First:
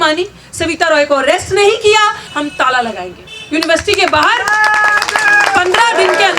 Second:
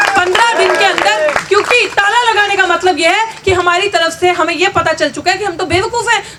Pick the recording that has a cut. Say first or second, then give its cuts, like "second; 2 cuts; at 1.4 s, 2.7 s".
first; 1 cut; at 2.2 s